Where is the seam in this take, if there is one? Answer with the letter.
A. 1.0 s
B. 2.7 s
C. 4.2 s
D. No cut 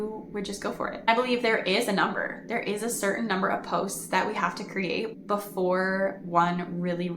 A